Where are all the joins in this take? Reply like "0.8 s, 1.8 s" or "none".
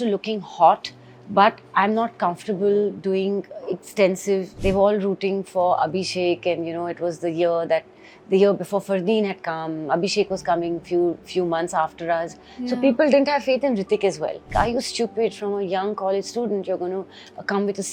4.5 s, 14.5 s

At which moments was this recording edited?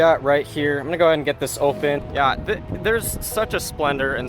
2.1 s

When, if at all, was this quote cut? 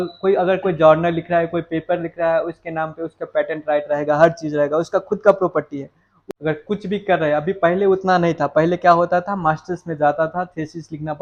none

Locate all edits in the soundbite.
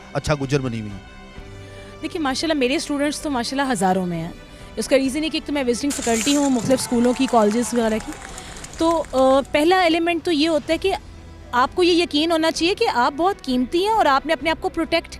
none

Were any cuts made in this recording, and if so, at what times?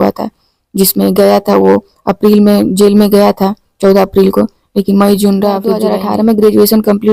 5.8 s

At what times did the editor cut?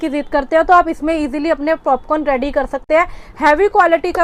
none

